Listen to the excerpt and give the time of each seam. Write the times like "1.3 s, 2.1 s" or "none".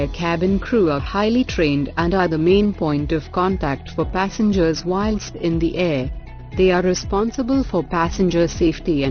1.0 s